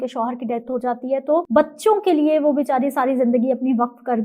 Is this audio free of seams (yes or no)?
no